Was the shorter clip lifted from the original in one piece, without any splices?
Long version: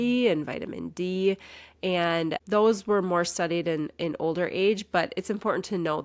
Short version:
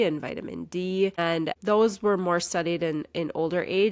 no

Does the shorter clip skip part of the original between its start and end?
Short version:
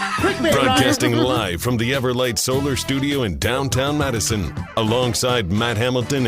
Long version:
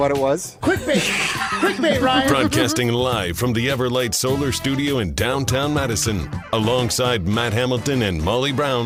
yes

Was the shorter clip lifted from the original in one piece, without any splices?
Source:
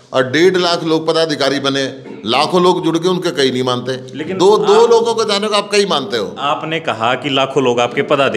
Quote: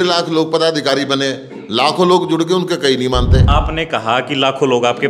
no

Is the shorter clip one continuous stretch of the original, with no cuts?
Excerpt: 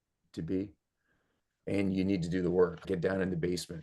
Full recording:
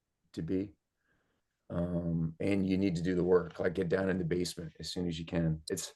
no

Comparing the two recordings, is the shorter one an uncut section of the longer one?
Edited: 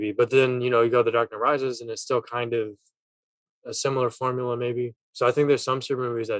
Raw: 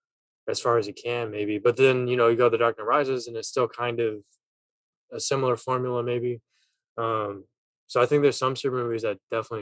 no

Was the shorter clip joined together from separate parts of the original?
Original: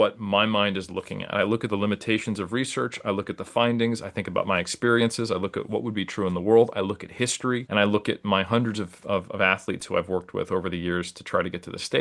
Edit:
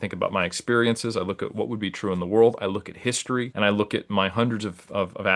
no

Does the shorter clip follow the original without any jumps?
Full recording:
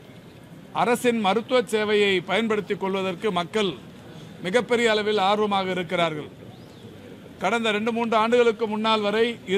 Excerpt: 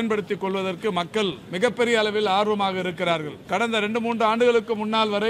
no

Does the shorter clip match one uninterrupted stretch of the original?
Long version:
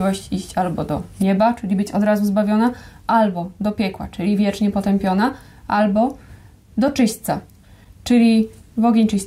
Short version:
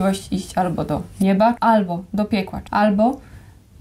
no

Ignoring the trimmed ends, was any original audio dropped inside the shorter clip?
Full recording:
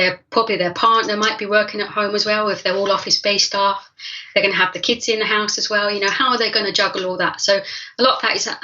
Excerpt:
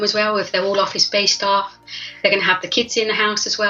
no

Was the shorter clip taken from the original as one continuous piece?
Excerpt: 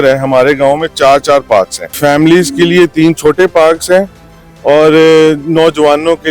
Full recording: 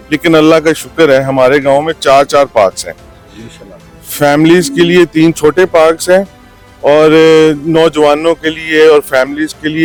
no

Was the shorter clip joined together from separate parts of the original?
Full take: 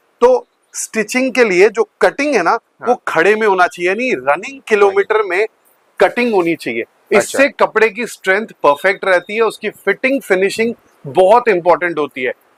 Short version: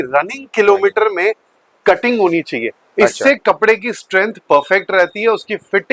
no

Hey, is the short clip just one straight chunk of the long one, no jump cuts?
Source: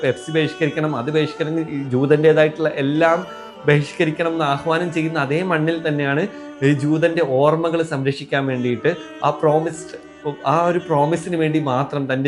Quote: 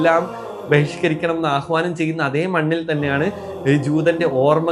yes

